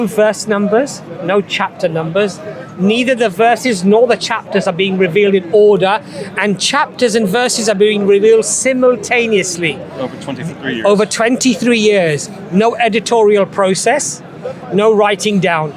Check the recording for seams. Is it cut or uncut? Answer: uncut